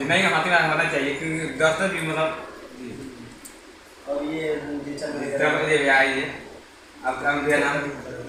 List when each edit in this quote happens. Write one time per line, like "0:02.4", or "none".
none